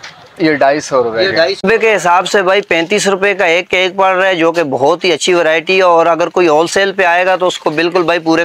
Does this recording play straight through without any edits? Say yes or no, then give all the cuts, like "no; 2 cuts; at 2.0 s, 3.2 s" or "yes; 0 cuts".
no; 1 cut; at 1.6 s